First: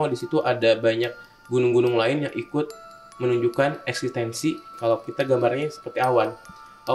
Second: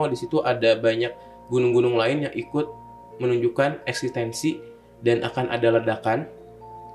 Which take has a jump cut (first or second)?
first